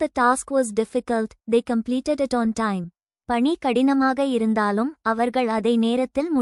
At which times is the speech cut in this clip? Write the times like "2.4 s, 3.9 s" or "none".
none